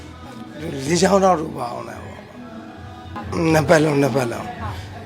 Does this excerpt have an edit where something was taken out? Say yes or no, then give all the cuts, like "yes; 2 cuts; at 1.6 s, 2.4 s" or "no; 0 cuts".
yes; 1 cut; at 3.2 s